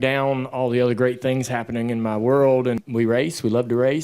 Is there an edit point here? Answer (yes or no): yes